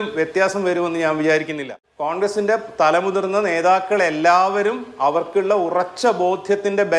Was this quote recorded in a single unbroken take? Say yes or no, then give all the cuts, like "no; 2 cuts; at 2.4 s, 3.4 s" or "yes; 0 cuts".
no; 1 cut; at 1.6 s